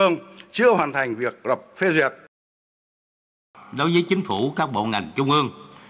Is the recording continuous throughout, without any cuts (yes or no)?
no